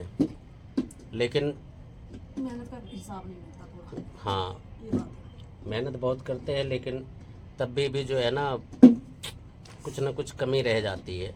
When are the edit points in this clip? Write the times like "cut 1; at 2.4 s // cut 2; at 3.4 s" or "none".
none